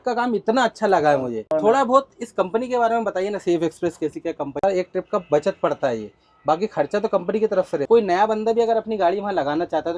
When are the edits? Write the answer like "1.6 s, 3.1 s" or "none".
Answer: 1.4 s, 4.6 s, 7.8 s